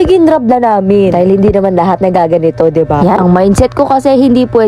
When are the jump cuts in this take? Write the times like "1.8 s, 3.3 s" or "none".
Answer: 3.2 s